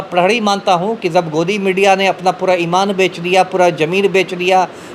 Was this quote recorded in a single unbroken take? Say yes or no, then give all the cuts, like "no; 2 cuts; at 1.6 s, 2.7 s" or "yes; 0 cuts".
yes; 0 cuts